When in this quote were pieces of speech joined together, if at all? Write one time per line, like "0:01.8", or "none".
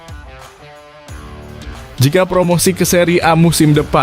0:02.0